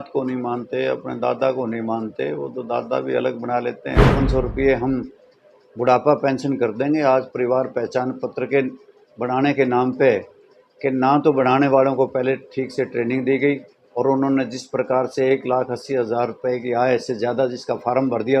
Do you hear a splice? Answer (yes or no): yes